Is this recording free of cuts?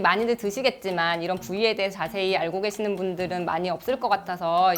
yes; 0 cuts

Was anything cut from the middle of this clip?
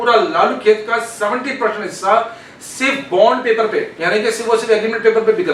yes; 1 cut; at 3.9 s

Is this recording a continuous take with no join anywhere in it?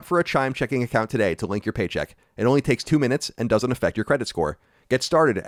yes; 0 cuts

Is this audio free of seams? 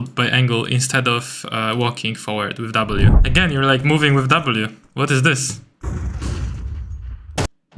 no; 1 cut; at 3.2 s

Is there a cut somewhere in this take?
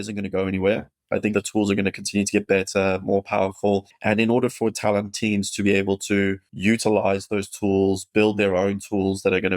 yes; 3 cuts; at 1.3 s, 3.9 s, 6.5 s

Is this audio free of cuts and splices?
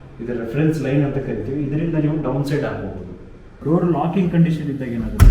no; 1 cut; at 3.6 s

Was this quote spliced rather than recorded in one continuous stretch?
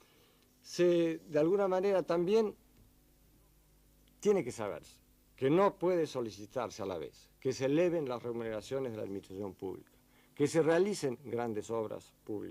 yes; 1 cut; at 2.1 s

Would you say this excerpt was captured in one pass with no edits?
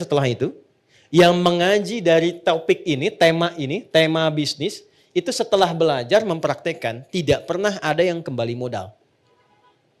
yes; 0 cuts

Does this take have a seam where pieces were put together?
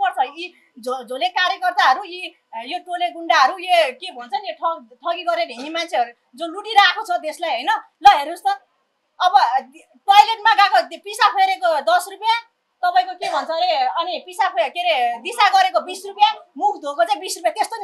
no; 0 cuts

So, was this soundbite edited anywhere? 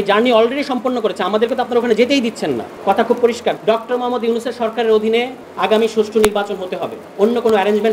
yes; 3 cuts; at 2.7 s, 3.6 s, 5.4 s

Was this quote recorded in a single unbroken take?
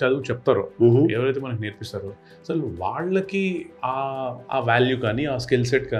yes; 0 cuts

